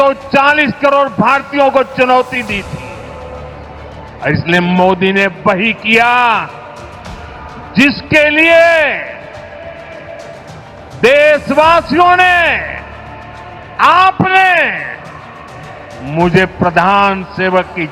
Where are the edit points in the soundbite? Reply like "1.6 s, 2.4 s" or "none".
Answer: none